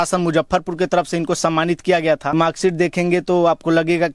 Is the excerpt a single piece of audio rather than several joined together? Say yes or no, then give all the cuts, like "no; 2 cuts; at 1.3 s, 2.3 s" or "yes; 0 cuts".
no; 1 cut; at 2.3 s